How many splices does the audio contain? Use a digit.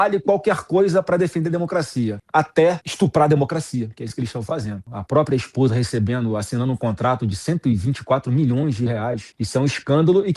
3